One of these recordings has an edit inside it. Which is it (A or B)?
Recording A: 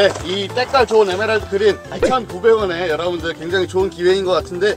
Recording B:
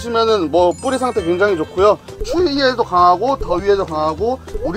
B